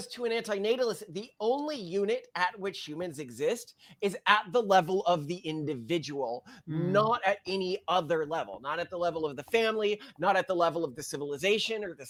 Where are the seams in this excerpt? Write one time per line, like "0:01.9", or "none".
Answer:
none